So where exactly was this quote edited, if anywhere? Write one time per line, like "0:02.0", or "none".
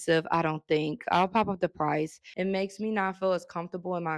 0:02.2